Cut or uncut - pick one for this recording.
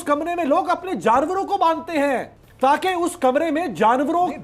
cut